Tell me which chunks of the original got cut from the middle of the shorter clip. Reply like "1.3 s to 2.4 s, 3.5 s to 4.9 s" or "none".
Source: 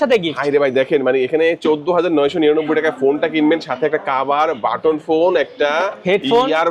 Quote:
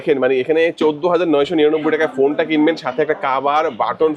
none